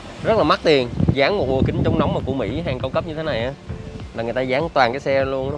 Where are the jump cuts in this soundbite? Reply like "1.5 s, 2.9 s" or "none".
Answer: 1.2 s